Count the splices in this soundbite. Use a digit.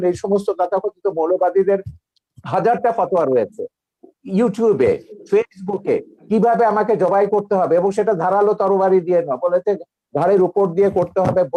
0